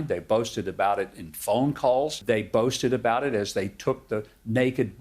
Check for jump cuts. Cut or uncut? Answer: cut